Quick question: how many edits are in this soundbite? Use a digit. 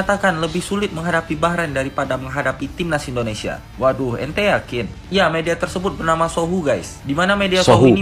0